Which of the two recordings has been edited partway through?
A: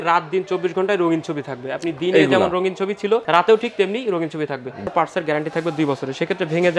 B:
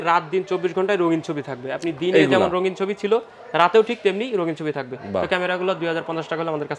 A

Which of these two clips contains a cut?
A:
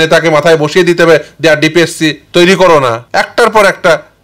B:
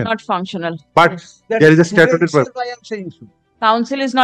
A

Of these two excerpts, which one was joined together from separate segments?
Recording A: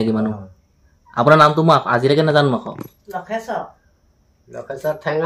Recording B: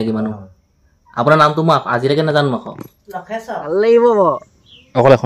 B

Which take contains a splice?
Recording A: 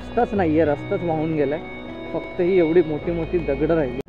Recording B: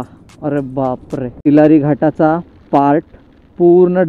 B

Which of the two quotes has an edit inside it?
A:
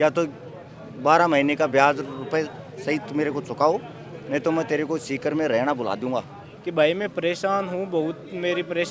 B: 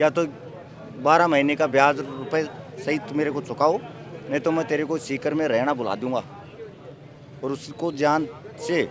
A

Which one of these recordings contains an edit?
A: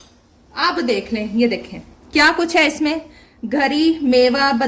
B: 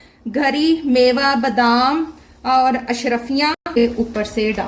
B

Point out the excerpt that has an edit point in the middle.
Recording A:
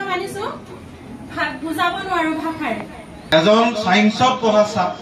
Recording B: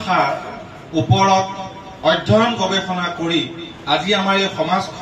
A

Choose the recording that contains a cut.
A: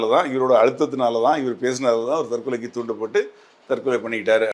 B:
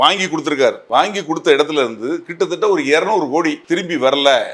B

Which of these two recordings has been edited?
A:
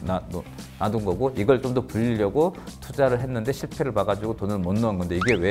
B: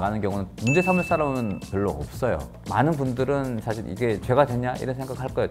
B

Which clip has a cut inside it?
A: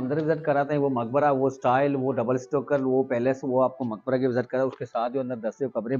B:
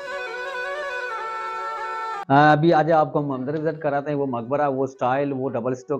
B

